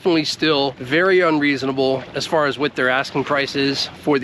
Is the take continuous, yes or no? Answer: yes